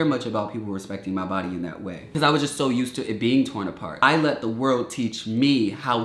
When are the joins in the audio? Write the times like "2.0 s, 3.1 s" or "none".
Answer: 2.1 s, 4.0 s